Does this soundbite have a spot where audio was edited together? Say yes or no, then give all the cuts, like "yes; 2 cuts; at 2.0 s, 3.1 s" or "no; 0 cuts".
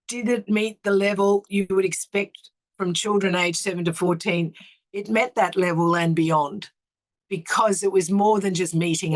no; 0 cuts